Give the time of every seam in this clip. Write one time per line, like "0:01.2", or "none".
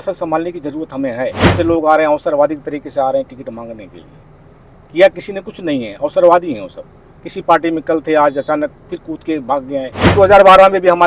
0:01.5
0:10.1